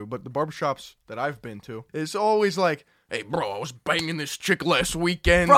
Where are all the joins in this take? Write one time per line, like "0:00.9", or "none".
0:01.8